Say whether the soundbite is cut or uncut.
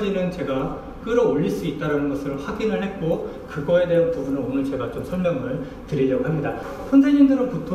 cut